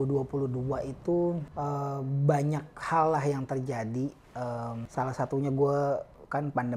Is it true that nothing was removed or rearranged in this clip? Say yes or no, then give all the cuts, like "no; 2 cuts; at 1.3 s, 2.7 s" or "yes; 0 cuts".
no; 2 cuts; at 1.5 s, 4.8 s